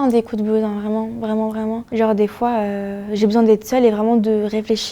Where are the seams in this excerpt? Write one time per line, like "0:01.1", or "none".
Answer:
0:01.9

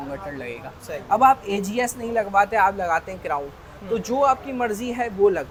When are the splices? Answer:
none

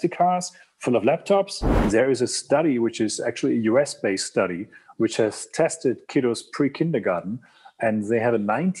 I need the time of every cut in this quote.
0:01.7

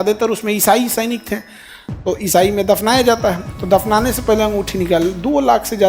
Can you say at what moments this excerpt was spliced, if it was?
0:03.5

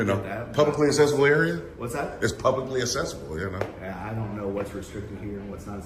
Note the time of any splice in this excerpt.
none

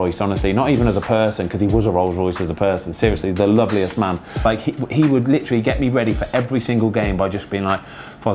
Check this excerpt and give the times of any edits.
0:04.3

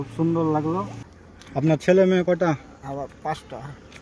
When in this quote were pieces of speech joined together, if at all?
0:00.9

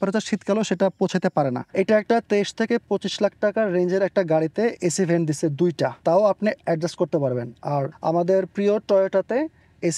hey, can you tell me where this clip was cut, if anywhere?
0:01.6
0:06.0
0:07.9

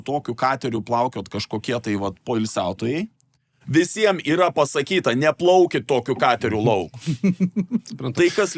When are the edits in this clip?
none

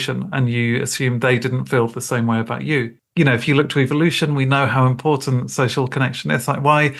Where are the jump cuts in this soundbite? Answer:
0:03.0

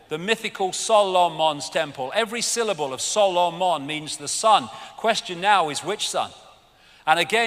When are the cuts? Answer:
none

